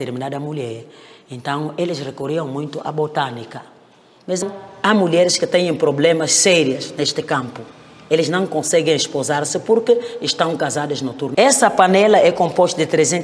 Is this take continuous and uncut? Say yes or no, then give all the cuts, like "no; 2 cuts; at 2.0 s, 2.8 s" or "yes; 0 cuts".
no; 2 cuts; at 4.4 s, 11.3 s